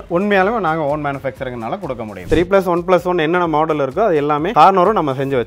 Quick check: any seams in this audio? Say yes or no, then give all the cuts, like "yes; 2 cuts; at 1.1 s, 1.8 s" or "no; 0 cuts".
yes; 2 cuts; at 2.2 s, 4.5 s